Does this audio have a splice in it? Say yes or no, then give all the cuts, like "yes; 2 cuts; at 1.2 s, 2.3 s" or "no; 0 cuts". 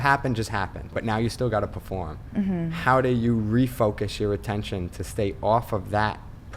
yes; 1 cut; at 1.0 s